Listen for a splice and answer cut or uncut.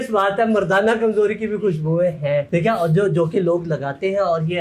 uncut